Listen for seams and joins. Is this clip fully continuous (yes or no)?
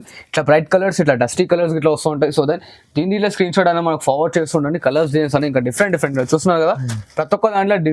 yes